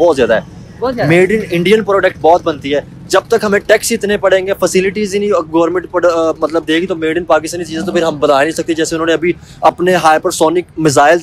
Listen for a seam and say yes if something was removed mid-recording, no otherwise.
no